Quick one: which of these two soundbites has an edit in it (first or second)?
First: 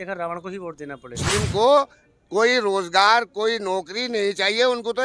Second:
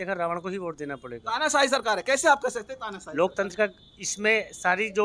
first